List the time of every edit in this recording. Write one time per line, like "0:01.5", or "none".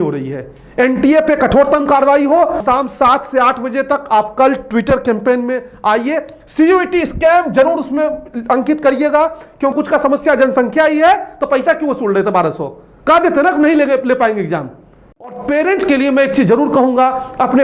0:02.6
0:09.7
0:15.3